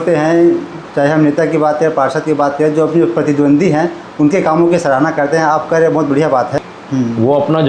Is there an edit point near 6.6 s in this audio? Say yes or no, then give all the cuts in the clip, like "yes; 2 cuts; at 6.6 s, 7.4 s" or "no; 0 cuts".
yes; 1 cut; at 6.6 s